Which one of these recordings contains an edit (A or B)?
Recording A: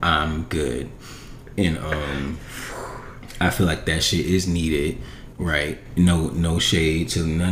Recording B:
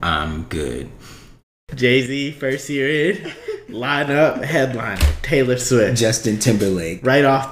B